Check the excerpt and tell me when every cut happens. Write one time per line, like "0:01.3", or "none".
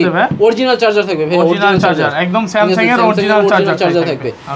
none